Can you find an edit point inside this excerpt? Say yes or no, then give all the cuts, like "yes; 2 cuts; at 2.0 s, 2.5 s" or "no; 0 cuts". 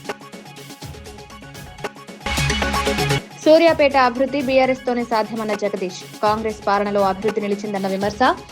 yes; 1 cut; at 2.1 s